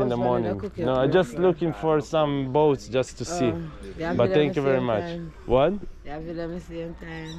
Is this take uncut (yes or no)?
yes